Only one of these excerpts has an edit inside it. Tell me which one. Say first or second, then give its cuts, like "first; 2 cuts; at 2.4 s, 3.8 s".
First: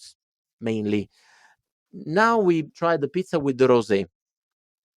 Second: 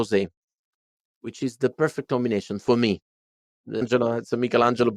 first; 1 cut; at 2.7 s